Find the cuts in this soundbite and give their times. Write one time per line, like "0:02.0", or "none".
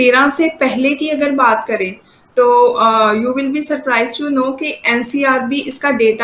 none